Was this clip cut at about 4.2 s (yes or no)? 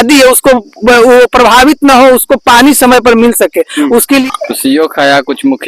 yes